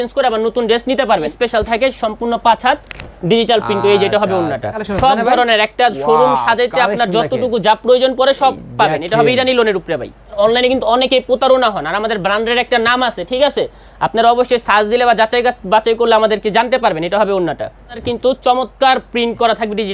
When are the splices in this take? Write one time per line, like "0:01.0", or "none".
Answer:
0:01.3
0:04.8
0:10.3
0:18.0